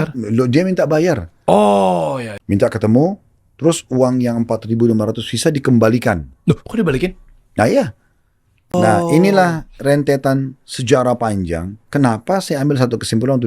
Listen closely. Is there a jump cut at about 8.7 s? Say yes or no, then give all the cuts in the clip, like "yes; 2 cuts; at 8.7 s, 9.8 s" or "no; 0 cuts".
yes; 2 cuts; at 2.3 s, 8.7 s